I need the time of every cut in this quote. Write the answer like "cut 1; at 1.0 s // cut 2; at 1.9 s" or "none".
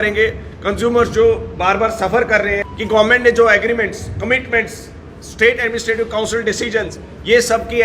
cut 1; at 2.7 s